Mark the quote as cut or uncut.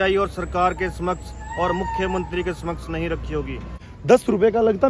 cut